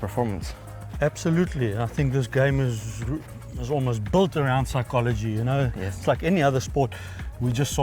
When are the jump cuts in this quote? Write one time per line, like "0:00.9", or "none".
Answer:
none

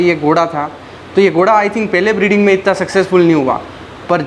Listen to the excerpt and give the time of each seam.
none

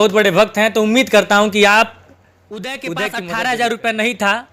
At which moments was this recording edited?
0:02.8

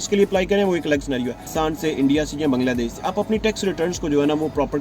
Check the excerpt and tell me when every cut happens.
0:01.5

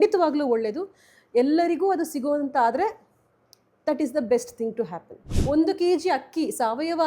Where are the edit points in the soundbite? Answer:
0:05.3

